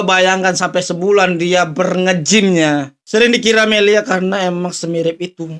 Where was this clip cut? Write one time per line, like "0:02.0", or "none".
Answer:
0:03.0